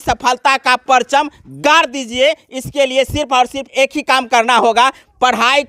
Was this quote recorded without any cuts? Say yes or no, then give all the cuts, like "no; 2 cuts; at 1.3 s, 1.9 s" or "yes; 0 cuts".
no; 1 cut; at 3.6 s